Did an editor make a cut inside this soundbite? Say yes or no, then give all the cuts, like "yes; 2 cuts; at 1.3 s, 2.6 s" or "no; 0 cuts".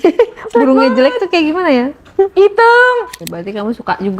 yes; 1 cut; at 3.2 s